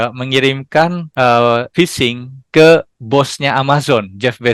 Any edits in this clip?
yes; 2 cuts; at 1.0 s, 1.7 s

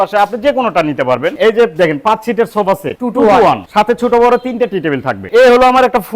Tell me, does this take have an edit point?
yes; 4 cuts; at 1.3 s, 3.0 s, 3.6 s, 5.2 s

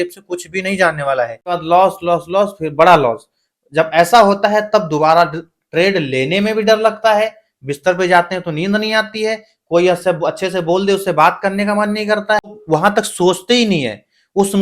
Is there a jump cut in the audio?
yes; 2 cuts; at 1.5 s, 12.5 s

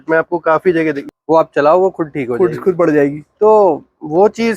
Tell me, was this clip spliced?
yes; 1 cut; at 1.0 s

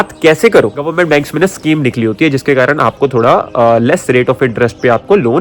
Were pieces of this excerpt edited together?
yes; 1 cut; at 0.9 s

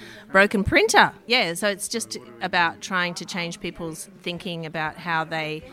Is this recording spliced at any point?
yes; 1 cut; at 1.2 s

